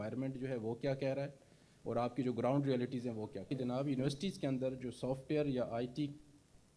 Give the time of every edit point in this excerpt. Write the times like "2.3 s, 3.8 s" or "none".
3.5 s

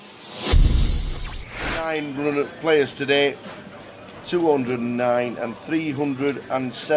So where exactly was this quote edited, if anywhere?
1.7 s

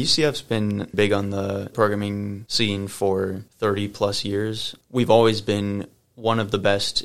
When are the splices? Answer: 0.9 s

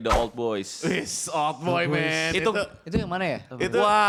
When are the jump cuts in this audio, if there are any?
none

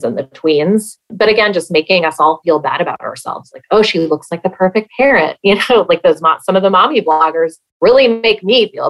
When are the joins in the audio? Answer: 1.1 s

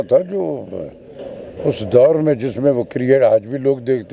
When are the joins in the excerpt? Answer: none

